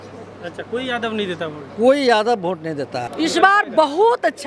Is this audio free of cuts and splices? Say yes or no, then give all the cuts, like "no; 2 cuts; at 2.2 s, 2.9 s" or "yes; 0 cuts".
no; 1 cut; at 3.0 s